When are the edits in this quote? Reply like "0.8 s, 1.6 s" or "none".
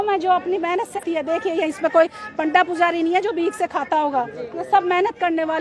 1.0 s